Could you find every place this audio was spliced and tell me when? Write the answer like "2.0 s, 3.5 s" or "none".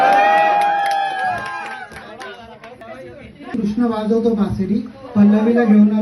2.8 s